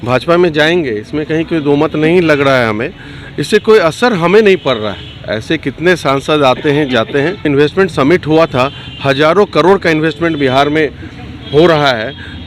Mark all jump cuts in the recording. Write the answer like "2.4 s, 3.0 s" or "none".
7.5 s